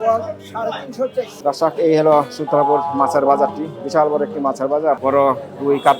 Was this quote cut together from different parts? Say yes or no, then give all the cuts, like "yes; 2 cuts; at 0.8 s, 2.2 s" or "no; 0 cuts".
yes; 2 cuts; at 1.3 s, 5.0 s